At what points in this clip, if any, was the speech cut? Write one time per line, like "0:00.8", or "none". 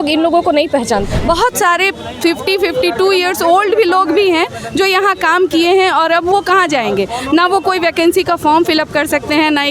0:01.1